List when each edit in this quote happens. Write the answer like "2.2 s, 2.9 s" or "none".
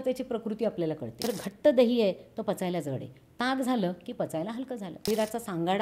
1.2 s, 5.0 s